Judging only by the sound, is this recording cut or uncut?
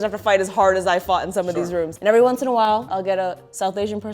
cut